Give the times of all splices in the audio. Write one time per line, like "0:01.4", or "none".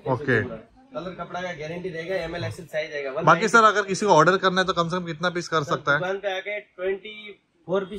none

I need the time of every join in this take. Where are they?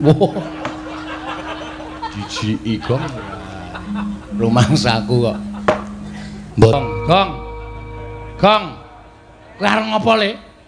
0:06.7

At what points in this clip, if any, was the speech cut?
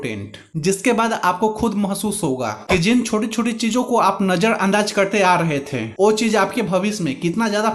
none

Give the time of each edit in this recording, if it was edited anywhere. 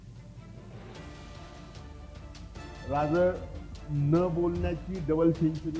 0:02.3

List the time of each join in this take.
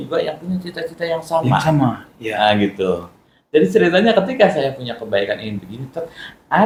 none

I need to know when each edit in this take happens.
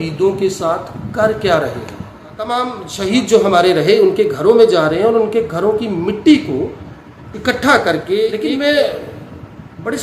0:02.5
0:08.4

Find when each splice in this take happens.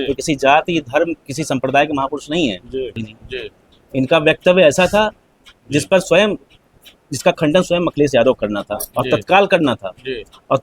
0:03.0

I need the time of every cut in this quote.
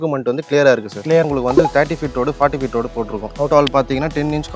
0:01.2
0:03.5

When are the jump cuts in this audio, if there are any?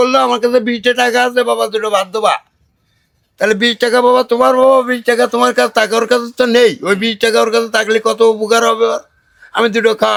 none

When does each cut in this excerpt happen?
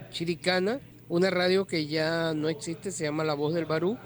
0:00.9

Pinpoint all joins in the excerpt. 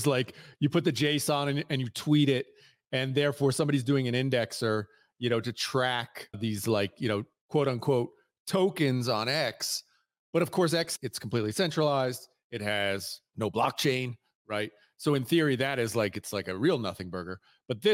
0:06.4
0:10.9
0:13.2

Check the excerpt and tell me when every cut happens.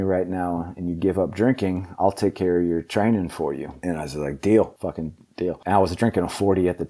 0:03.7
0:05.2

